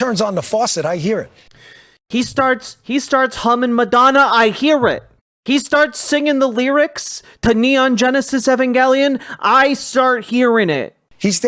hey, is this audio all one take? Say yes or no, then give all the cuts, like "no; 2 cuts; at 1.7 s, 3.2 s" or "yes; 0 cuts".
yes; 0 cuts